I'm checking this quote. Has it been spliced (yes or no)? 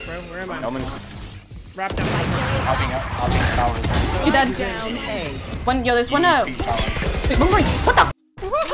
yes